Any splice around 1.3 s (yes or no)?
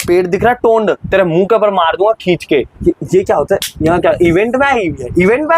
no